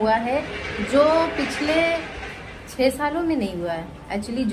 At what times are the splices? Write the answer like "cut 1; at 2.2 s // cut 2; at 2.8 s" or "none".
none